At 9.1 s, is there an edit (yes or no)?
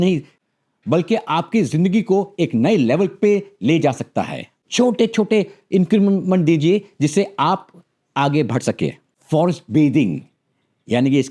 yes